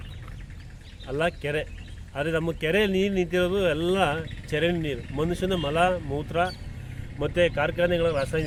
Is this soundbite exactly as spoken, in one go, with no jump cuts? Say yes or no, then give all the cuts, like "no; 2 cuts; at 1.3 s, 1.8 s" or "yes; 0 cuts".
yes; 0 cuts